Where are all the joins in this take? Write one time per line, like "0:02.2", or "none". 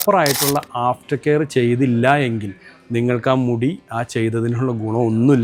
none